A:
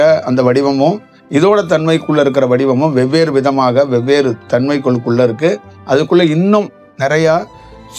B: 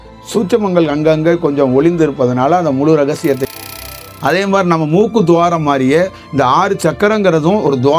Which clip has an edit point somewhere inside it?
B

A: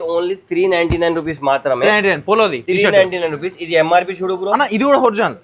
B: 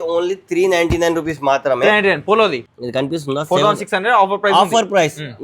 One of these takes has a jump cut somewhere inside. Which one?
B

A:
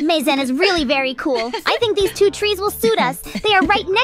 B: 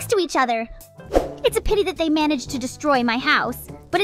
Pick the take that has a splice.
B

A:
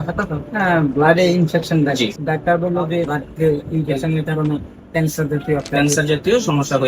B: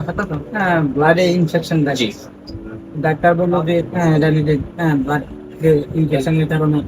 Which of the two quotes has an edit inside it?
A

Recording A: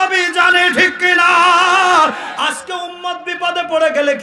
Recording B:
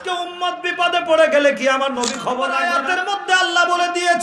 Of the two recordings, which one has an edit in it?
B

